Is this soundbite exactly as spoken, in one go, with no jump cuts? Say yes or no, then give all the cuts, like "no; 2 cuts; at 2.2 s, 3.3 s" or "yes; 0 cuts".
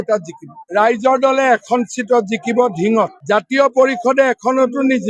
yes; 0 cuts